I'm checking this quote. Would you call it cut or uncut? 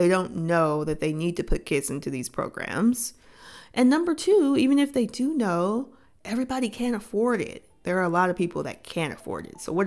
cut